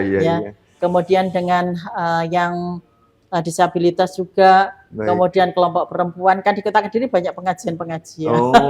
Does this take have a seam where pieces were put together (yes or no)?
no